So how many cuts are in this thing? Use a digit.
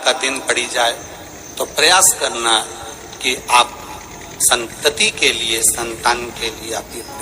0